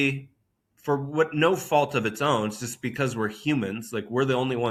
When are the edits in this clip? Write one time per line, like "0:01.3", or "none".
none